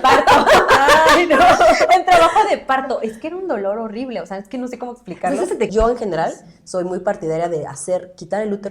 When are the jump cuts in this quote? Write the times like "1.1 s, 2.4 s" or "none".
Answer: 5.7 s